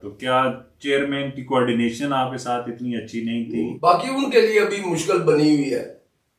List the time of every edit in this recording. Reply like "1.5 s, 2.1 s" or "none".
3.7 s